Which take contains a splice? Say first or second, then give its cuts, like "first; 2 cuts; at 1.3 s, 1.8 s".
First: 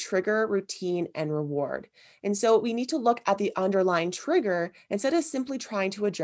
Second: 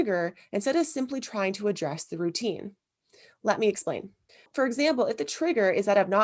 second; 1 cut; at 4.5 s